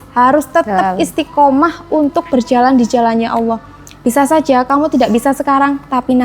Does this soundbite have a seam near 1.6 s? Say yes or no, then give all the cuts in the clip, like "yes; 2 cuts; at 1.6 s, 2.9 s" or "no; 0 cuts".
no; 0 cuts